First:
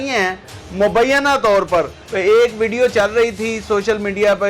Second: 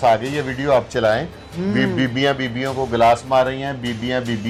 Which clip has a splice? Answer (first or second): first